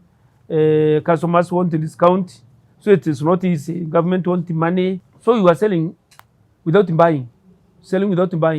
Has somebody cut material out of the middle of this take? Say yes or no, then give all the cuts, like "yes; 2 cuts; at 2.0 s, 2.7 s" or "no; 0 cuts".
yes; 1 cut; at 5.1 s